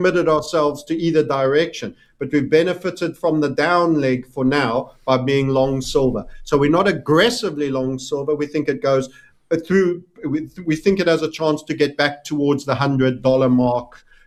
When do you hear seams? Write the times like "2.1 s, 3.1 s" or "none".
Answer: none